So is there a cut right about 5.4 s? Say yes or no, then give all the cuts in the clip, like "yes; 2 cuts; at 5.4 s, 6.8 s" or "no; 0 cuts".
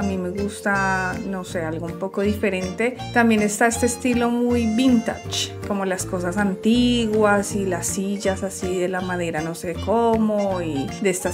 no; 0 cuts